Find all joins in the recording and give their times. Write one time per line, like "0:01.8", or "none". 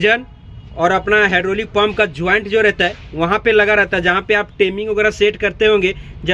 none